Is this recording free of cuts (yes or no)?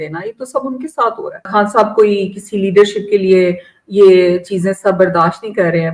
no